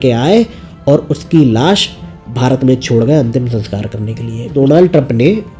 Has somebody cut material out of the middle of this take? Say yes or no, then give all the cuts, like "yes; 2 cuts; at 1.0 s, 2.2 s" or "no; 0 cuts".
yes; 1 cut; at 4.5 s